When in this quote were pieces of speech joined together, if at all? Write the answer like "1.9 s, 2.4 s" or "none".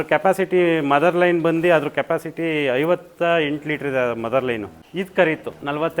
4.8 s

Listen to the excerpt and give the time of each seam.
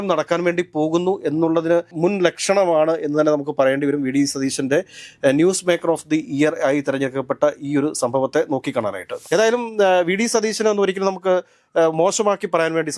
9.2 s

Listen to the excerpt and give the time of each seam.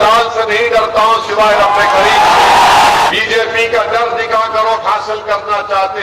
3.1 s

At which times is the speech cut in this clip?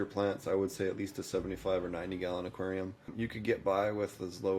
3.1 s

